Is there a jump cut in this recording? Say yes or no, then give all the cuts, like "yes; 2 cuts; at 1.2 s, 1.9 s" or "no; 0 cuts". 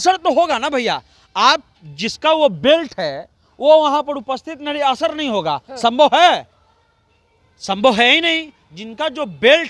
no; 0 cuts